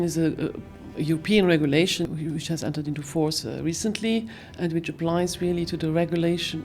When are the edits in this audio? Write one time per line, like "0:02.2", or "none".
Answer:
0:02.1